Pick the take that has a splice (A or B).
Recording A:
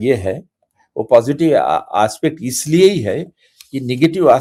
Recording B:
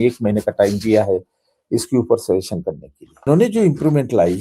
B